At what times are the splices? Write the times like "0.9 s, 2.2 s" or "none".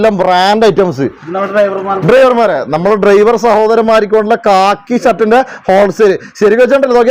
none